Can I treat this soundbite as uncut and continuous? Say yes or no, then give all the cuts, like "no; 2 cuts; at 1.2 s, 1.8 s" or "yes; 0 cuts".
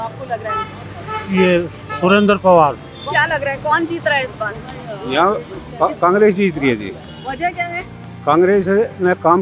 no; 1 cut; at 2.9 s